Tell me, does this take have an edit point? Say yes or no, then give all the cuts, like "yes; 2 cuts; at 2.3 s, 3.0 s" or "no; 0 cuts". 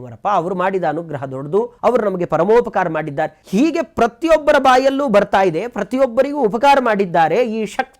yes; 2 cuts; at 1.7 s, 3.4 s